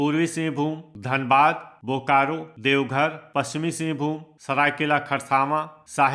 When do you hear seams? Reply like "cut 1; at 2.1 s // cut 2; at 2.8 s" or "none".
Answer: cut 1; at 0.9 s // cut 2; at 3.2 s